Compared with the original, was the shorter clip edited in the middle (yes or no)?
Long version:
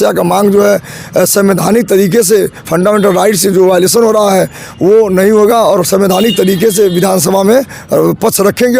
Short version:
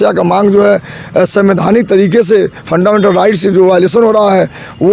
no